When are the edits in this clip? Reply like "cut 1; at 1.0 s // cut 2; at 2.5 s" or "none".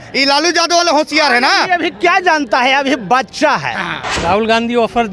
cut 1; at 4.1 s